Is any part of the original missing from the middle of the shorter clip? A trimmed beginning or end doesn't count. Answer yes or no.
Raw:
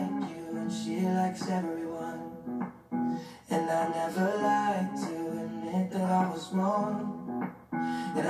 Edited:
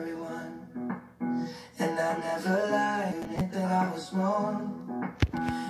yes